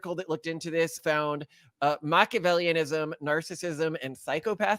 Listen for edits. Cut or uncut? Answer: cut